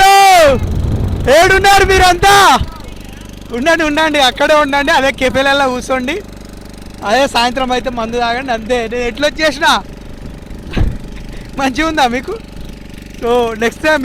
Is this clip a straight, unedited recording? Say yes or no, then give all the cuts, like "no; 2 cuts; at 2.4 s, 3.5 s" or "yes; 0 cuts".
yes; 0 cuts